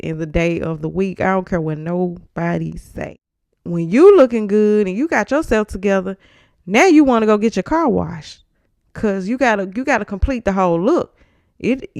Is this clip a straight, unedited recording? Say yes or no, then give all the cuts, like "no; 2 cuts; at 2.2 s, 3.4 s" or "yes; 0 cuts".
no; 1 cut; at 2.9 s